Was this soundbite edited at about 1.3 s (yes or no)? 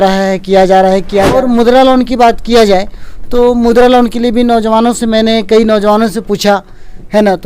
yes